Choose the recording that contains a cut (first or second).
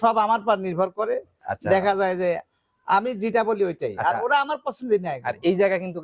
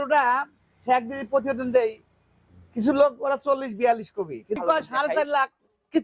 second